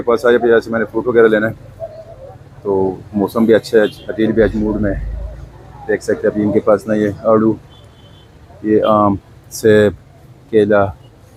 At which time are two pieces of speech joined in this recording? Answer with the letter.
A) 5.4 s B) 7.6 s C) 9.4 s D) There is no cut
D